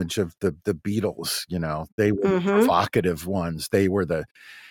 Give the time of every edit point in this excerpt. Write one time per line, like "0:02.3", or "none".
none